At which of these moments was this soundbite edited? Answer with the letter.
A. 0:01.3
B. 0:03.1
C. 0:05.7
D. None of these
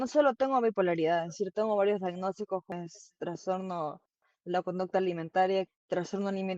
C